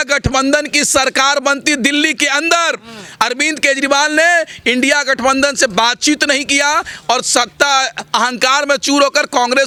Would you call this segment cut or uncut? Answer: uncut